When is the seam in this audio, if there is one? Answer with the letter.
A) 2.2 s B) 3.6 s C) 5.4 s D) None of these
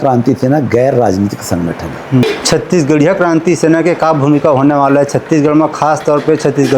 A